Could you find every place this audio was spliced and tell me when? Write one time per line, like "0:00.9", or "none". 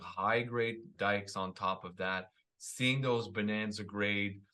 0:00.9